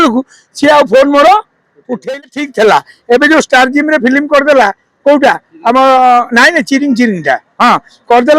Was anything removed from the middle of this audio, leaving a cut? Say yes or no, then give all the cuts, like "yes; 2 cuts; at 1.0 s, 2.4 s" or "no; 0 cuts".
yes; 1 cut; at 2.1 s